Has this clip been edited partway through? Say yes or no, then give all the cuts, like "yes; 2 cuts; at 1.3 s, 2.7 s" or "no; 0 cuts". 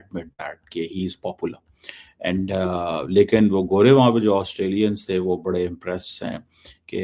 no; 0 cuts